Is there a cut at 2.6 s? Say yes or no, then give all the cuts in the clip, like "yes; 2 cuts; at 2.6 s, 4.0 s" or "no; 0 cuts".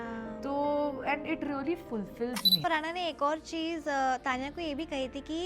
yes; 1 cut; at 2.6 s